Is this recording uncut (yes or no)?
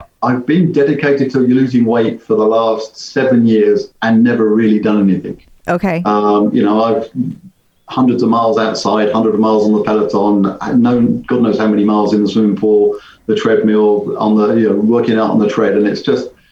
yes